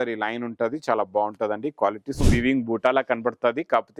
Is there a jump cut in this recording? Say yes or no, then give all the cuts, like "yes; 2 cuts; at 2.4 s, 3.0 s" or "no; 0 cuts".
yes; 1 cut; at 2.3 s